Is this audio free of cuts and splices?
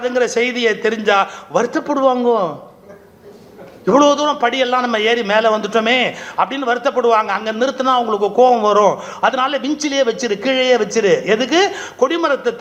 yes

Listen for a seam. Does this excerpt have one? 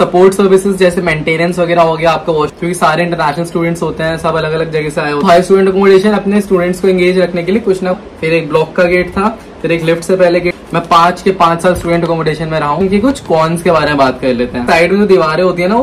yes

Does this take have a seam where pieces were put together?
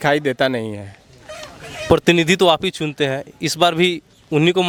no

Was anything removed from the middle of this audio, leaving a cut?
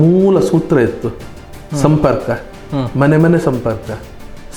no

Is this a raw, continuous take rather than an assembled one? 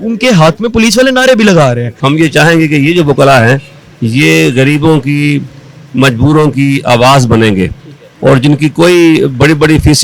no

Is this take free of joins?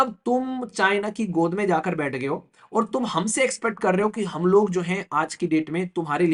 yes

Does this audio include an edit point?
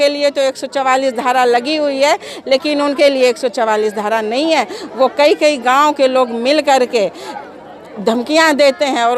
no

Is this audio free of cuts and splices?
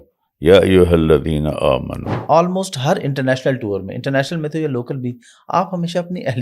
no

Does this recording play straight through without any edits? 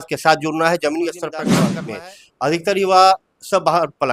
no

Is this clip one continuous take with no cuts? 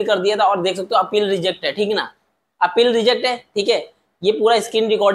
yes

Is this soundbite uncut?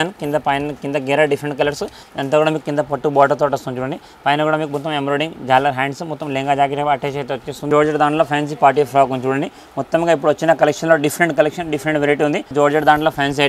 no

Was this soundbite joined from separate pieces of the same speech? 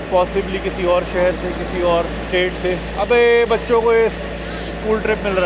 no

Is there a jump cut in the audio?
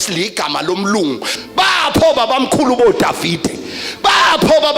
yes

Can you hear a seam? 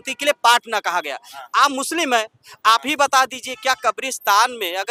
no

